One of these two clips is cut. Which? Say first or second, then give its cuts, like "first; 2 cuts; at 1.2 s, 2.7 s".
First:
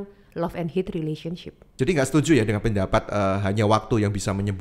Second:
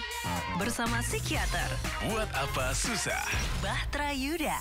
first; 1 cut; at 1.6 s